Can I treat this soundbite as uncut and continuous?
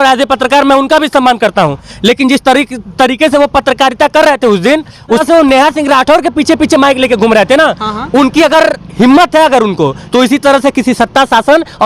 no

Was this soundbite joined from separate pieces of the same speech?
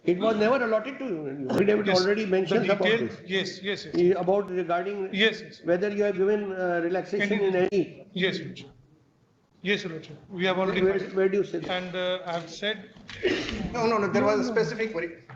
yes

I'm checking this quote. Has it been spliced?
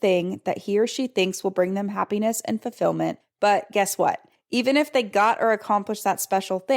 yes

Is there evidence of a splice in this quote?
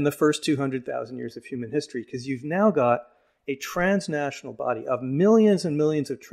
no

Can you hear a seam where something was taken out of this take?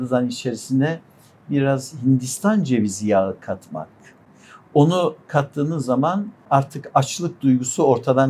yes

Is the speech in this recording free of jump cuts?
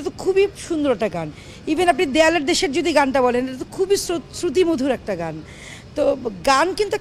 yes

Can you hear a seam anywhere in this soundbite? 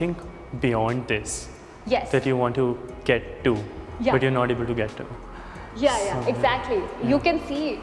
no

